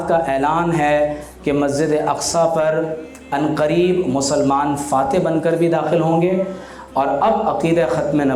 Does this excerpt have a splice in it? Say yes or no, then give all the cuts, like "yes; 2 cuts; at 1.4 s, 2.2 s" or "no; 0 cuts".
no; 0 cuts